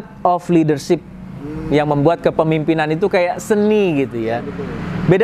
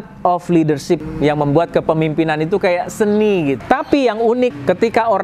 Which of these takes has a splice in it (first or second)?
second